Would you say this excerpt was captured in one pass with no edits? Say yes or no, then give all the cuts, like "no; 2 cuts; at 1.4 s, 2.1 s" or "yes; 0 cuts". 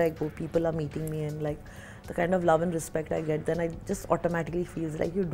yes; 0 cuts